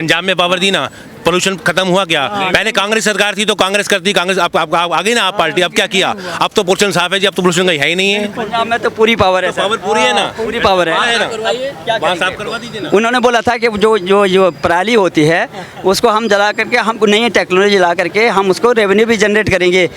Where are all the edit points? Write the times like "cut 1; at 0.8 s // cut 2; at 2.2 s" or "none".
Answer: none